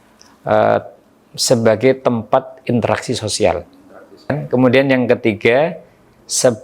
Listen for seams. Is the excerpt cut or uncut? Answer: cut